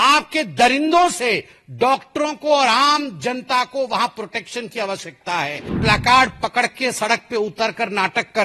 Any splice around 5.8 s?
yes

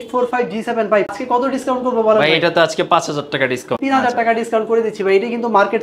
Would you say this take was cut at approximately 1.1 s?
yes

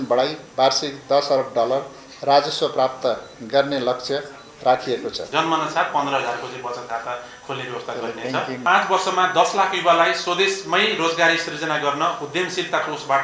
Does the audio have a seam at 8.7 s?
yes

